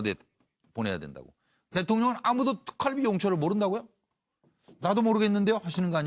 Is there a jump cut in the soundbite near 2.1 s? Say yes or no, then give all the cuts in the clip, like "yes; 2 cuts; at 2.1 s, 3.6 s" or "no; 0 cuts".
yes; 1 cut; at 2.1 s